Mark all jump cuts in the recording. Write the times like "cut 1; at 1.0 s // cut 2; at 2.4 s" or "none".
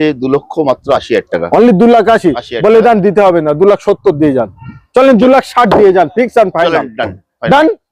none